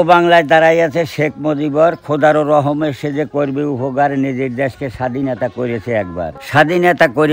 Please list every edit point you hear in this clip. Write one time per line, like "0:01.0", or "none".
0:06.4